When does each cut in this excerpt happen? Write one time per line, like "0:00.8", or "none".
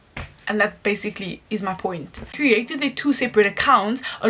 0:02.3